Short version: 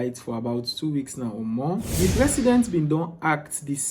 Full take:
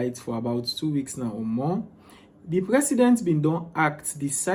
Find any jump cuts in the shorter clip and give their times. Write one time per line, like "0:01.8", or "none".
0:01.9